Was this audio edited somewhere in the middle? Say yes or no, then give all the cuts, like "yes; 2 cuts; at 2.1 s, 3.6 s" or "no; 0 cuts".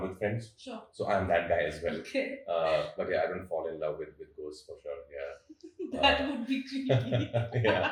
no; 0 cuts